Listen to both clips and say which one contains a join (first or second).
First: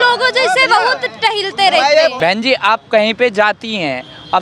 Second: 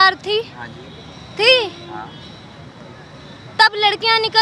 first